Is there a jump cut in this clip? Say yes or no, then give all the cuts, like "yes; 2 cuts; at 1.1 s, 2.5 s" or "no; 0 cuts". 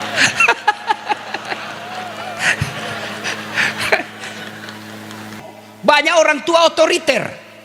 yes; 1 cut; at 5.4 s